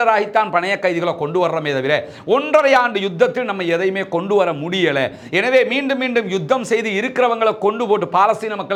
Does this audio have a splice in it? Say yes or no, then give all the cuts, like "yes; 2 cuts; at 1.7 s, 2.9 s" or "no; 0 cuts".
no; 0 cuts